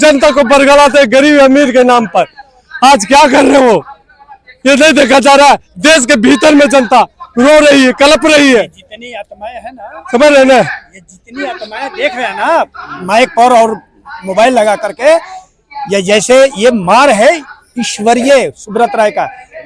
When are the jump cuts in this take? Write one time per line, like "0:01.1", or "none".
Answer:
none